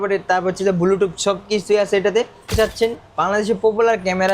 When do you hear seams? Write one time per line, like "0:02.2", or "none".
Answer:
0:02.5